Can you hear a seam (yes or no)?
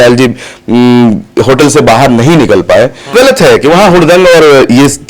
yes